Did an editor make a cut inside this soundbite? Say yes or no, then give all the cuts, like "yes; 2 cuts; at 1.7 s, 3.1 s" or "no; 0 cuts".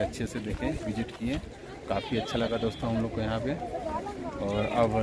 no; 0 cuts